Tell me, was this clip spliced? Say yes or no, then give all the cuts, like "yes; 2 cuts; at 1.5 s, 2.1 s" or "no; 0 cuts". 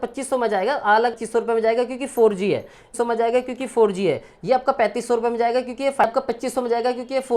yes; 3 cuts; at 1.2 s, 2.9 s, 6.0 s